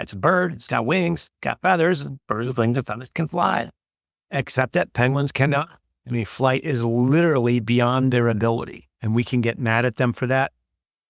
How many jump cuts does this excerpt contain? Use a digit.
0